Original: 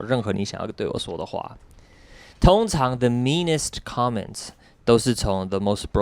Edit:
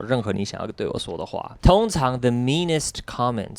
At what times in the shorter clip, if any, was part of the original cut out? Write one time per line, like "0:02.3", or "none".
0:01.5